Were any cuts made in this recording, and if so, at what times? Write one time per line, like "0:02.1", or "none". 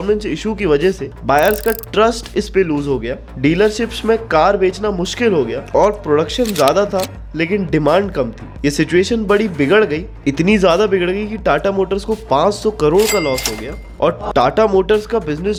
none